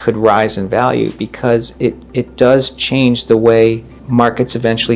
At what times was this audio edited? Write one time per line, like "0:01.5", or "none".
0:02.0
0:03.9